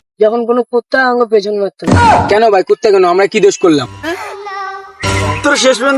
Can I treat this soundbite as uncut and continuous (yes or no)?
yes